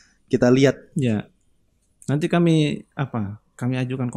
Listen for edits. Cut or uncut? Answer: uncut